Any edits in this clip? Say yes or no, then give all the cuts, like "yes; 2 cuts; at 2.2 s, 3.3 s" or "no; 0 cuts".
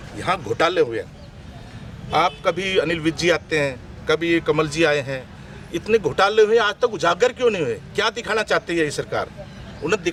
no; 0 cuts